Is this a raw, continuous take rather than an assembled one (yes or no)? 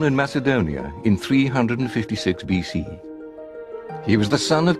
no